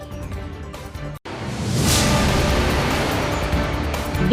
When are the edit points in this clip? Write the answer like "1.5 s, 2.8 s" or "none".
1.1 s